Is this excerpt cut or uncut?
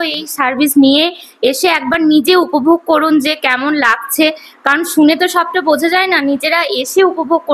uncut